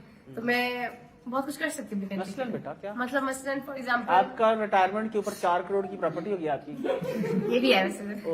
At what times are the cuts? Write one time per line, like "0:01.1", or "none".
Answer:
none

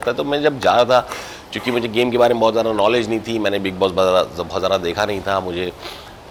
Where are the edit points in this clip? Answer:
none

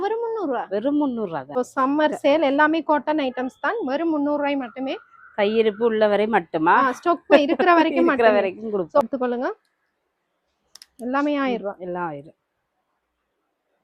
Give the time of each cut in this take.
0:01.5
0:09.1

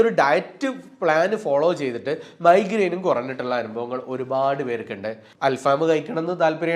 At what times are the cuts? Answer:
0:05.2

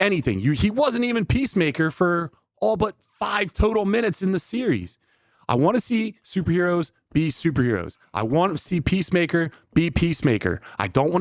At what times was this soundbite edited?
none

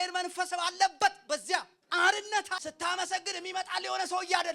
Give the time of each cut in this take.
0:01.8
0:02.6

